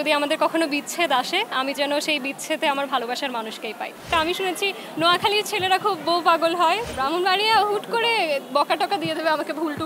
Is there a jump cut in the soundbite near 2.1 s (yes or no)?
no